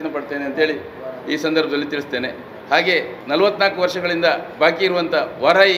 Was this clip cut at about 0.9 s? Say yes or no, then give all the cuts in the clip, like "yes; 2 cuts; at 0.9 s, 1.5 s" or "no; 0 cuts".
no; 1 cut; at 3.2 s